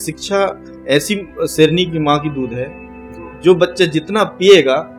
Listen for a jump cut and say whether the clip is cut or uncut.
uncut